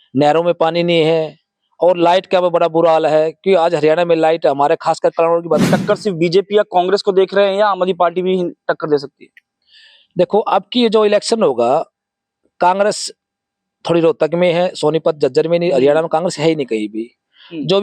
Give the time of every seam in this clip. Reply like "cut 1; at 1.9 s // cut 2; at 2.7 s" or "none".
cut 1; at 5.6 s